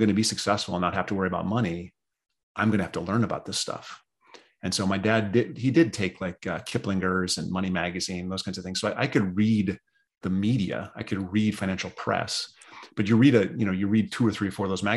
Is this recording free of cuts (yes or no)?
yes